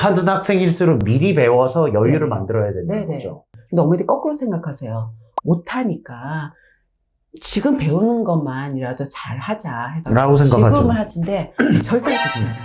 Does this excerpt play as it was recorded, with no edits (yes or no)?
no